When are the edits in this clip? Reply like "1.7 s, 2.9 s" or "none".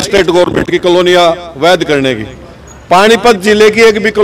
none